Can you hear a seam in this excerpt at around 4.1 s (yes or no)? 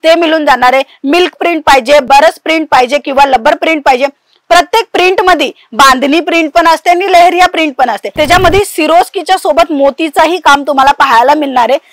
no